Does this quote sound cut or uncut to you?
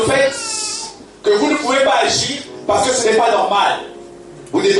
uncut